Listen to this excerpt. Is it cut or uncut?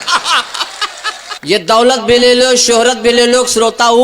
cut